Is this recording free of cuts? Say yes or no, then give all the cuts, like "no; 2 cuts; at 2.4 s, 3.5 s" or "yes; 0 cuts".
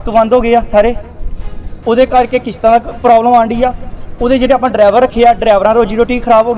yes; 0 cuts